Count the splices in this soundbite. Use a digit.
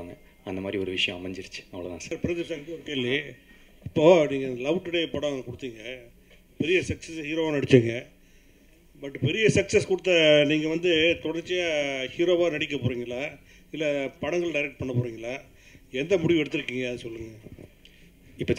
1